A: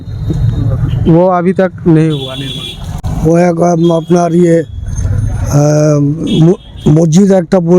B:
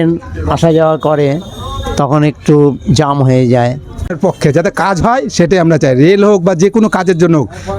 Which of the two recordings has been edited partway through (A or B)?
B